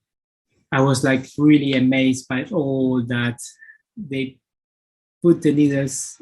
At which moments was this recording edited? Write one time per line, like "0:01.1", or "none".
0:03.9